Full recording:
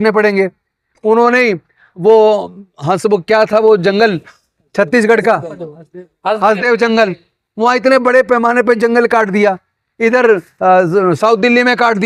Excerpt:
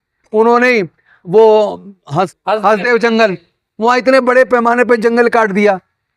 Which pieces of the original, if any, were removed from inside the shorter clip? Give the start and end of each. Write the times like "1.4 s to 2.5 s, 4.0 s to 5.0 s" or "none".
3.0 s to 6.1 s